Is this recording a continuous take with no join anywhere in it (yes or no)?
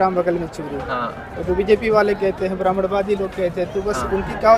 yes